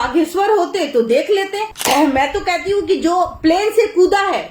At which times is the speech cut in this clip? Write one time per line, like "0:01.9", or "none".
0:01.7